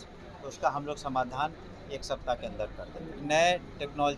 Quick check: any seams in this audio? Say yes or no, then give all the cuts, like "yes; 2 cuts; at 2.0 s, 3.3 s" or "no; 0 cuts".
yes; 1 cut; at 3.2 s